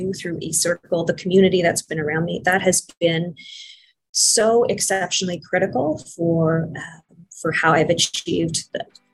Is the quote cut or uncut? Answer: uncut